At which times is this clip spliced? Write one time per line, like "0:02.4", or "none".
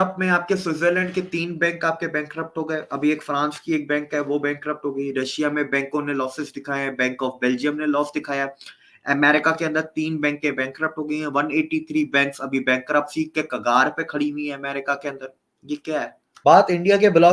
0:16.2